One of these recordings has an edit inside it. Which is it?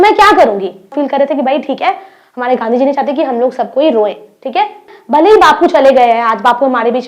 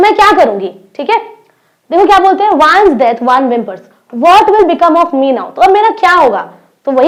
first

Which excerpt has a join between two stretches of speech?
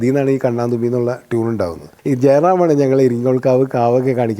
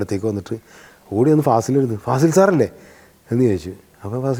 first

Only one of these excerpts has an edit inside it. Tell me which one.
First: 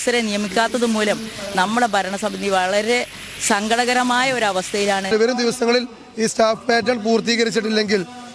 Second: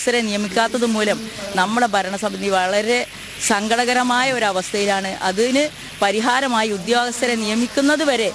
first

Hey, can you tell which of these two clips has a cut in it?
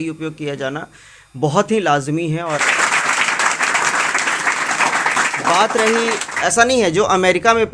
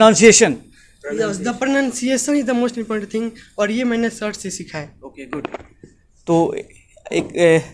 first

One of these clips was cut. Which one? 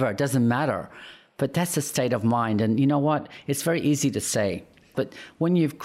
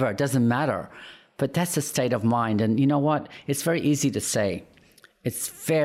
first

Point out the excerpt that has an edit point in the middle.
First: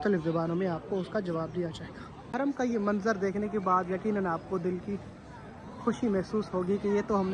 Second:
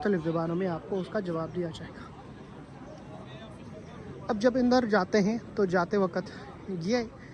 first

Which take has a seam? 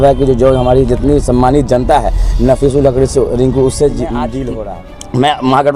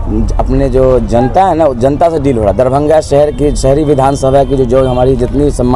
first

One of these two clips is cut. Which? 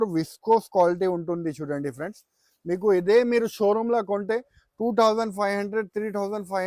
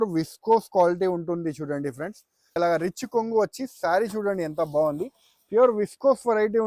second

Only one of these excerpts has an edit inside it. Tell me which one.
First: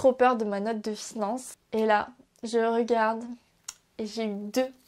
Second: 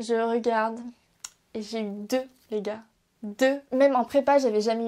first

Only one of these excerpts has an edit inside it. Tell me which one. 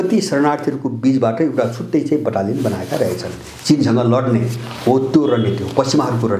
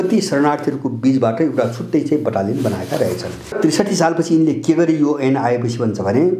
second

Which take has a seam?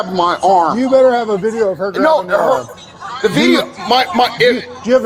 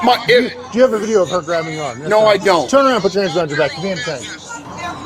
second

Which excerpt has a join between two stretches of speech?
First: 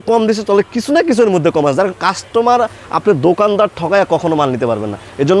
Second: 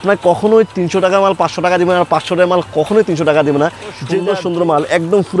second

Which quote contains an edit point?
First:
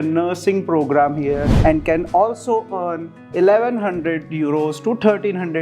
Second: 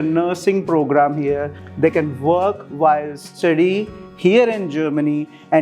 first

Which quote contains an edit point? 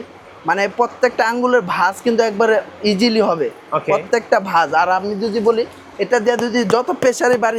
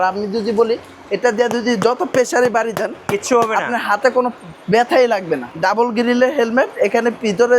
second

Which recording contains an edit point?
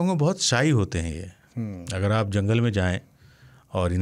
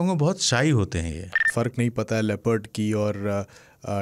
second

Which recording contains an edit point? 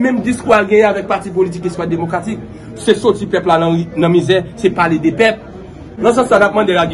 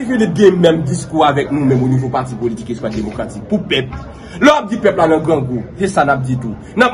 first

